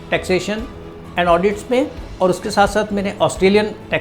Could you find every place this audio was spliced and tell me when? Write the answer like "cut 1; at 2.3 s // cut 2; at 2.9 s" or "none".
cut 1; at 2.0 s